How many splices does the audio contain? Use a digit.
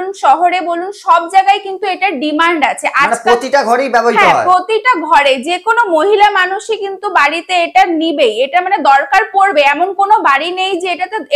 0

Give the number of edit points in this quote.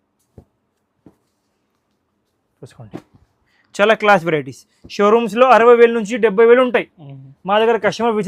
0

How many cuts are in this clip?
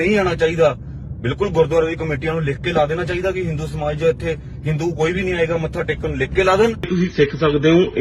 1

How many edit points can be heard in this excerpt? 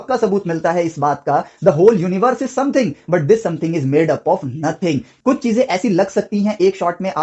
1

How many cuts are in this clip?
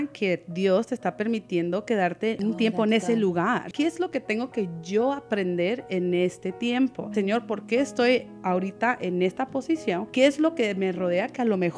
2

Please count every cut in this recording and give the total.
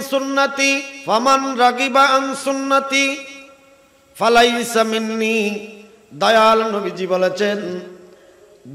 1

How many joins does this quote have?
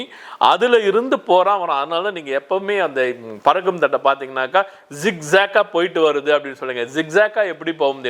0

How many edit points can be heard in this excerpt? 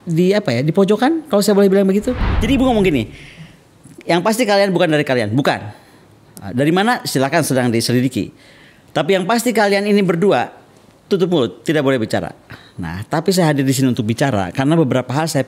1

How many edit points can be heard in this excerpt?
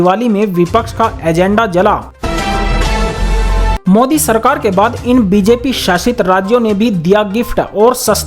2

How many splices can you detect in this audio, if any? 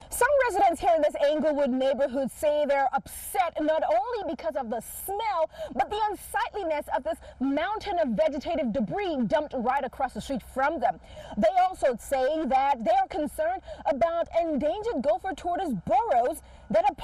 0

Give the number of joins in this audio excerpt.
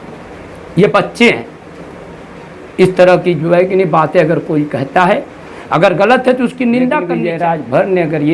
1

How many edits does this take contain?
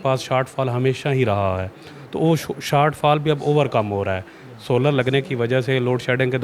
0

